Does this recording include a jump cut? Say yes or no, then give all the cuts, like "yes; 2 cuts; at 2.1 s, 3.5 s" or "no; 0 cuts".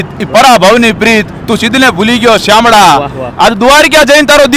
no; 0 cuts